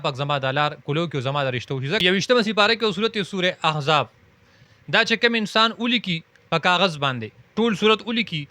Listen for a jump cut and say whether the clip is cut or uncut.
cut